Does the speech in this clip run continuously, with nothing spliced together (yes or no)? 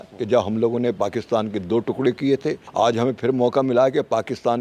no